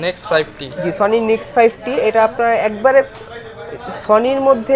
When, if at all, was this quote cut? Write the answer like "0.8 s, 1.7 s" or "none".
none

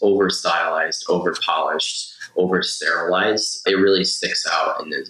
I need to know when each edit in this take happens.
3.6 s

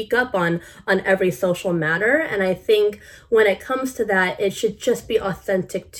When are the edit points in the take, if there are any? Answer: none

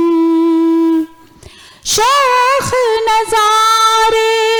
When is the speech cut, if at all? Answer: none

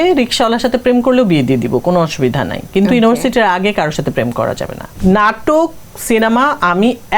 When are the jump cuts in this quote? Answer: 4.8 s

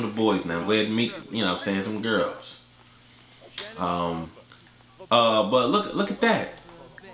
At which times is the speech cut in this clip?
none

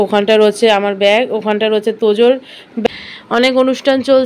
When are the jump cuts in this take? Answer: 2.7 s

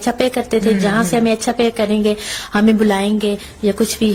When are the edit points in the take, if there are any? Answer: none

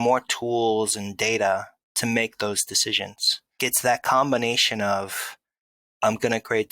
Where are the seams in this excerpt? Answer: 3.6 s

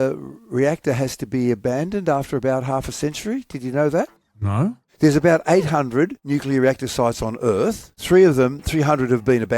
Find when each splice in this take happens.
4.8 s, 6.2 s, 7.9 s

